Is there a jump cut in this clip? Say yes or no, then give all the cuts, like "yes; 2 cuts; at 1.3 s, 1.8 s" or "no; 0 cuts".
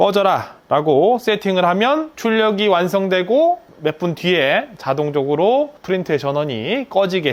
no; 0 cuts